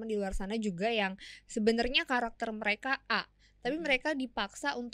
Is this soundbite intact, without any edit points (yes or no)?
yes